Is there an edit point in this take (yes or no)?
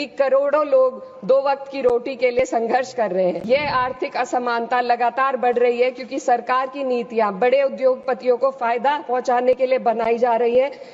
yes